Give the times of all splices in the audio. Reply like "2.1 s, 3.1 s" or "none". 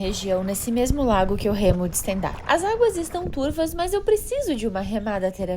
2.3 s